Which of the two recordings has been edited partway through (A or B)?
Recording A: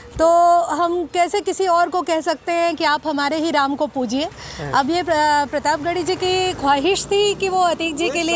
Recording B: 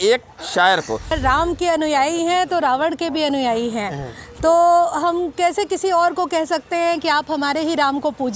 B